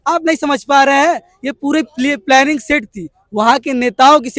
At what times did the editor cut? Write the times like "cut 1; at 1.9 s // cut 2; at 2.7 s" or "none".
none